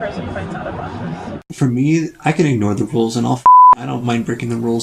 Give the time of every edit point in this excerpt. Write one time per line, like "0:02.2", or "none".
0:01.4